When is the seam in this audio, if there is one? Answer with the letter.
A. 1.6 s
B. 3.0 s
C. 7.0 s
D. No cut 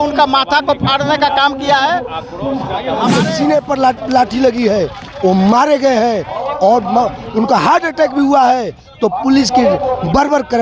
B